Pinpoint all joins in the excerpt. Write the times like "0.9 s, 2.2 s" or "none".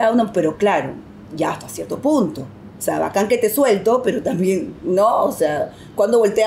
none